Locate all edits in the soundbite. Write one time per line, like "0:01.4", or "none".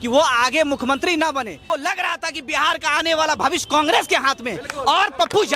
0:01.6